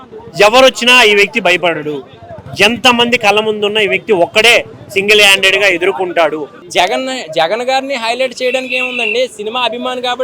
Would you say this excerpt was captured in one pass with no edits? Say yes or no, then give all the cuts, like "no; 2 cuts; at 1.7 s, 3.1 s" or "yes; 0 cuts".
no; 1 cut; at 6.6 s